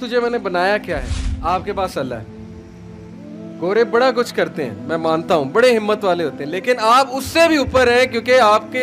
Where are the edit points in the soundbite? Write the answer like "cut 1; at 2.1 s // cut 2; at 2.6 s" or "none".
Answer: cut 1; at 1.1 s